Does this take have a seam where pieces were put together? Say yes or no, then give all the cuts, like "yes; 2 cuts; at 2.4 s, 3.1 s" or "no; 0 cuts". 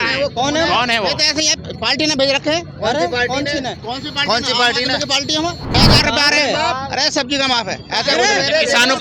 yes; 1 cut; at 5.8 s